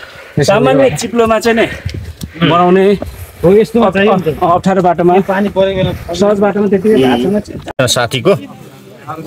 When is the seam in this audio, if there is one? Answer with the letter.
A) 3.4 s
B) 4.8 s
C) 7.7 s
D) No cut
C